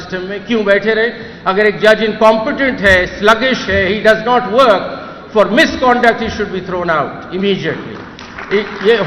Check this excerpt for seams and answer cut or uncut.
uncut